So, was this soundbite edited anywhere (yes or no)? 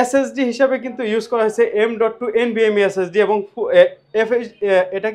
no